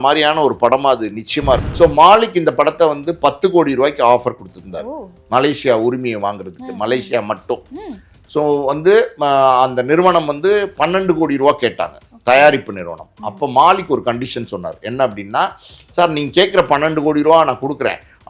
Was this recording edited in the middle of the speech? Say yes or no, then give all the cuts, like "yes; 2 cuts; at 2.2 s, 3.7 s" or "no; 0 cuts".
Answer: yes; 1 cut; at 1.7 s